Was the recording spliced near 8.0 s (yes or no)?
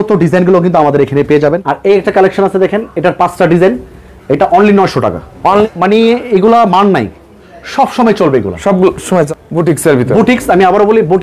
no